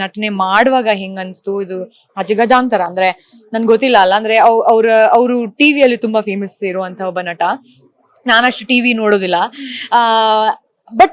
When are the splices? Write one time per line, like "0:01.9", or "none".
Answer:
none

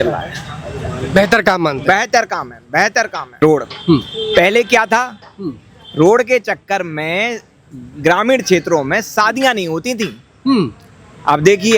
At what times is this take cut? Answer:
0:03.4

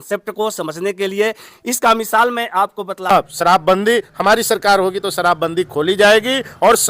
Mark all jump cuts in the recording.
0:03.1

